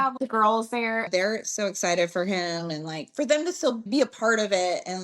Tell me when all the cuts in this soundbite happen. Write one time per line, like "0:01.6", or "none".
0:01.1

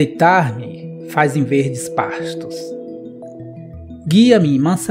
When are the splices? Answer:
0:02.5
0:04.0

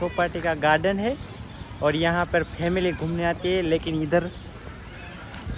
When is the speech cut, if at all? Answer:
none

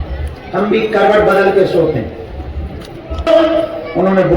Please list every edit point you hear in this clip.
0:03.3

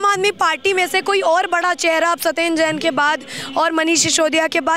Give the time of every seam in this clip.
none

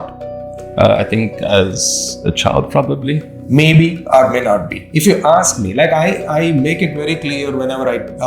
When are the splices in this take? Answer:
0:03.3

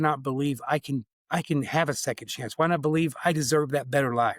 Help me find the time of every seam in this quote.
0:01.2

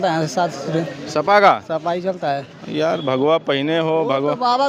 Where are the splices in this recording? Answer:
none

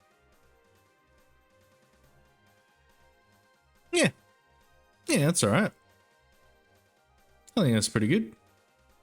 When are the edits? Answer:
none

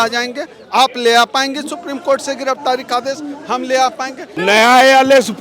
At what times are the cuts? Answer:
0:04.4

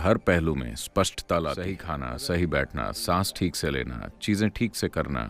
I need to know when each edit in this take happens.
0:01.8

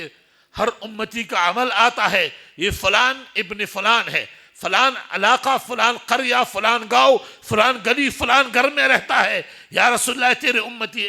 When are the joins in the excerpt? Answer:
none

